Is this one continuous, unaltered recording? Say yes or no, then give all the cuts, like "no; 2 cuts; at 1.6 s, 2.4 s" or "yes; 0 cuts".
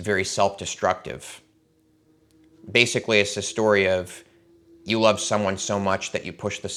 yes; 0 cuts